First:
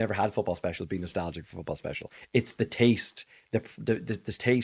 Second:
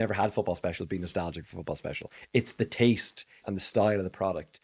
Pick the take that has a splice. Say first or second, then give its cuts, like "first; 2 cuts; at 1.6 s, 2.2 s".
second; 1 cut; at 3.4 s